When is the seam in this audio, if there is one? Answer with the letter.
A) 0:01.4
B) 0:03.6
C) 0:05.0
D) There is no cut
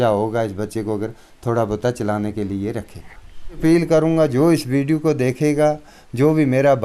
B